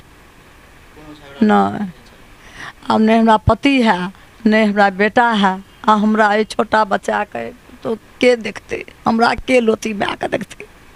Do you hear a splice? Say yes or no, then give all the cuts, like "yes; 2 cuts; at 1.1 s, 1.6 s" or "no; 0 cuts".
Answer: no; 0 cuts